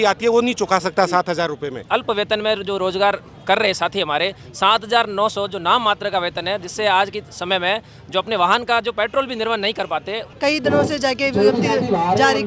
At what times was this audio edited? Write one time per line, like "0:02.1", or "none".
0:01.8
0:10.3